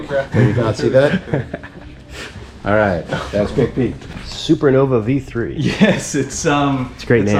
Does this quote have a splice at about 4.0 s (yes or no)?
yes